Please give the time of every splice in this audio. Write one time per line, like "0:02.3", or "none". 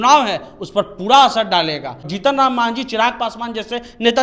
0:02.0